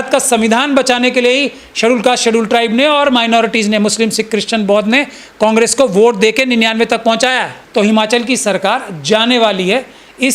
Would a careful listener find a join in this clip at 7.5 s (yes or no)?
yes